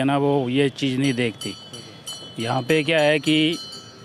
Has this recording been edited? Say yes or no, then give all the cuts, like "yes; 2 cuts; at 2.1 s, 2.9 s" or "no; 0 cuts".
no; 0 cuts